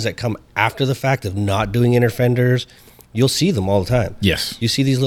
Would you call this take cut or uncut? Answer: uncut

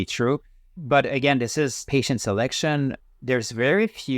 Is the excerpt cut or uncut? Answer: cut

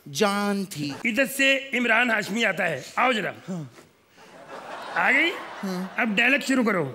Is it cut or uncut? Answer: cut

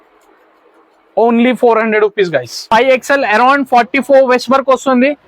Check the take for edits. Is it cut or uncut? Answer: cut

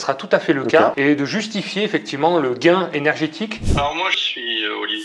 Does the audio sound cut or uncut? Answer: cut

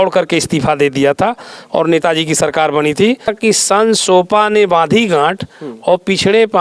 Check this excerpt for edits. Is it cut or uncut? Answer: cut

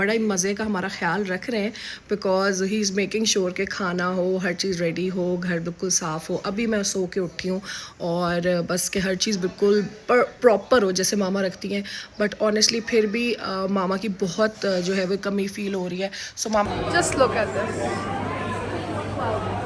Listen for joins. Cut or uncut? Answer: cut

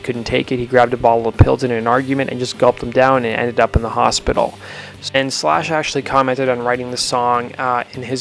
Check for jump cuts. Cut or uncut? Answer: cut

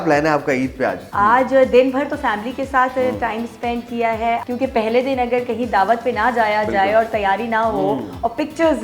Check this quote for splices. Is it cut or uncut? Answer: cut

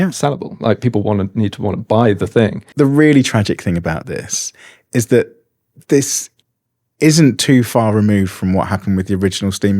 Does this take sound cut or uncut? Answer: cut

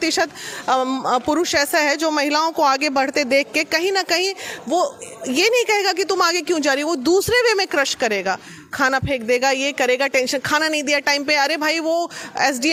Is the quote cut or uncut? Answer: uncut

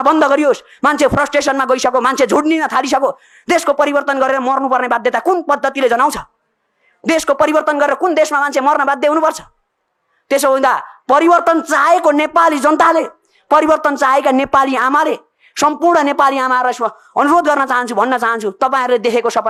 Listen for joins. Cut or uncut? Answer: uncut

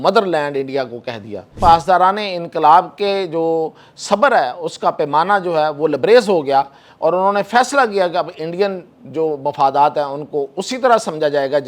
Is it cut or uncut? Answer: cut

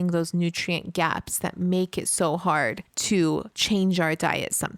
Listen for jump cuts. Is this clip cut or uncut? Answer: cut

